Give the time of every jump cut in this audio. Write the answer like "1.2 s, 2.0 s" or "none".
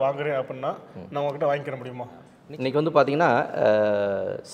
2.3 s